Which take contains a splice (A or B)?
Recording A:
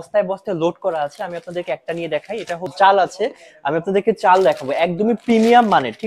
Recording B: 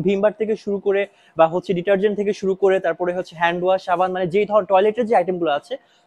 A